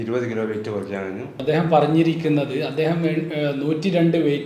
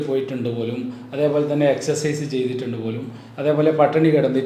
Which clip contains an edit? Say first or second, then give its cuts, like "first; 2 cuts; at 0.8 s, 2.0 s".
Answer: first; 1 cut; at 1.3 s